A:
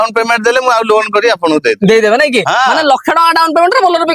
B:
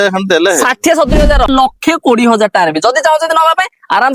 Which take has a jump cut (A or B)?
B